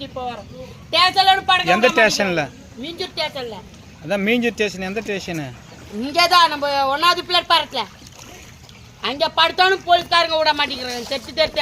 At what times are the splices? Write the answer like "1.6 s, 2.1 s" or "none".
none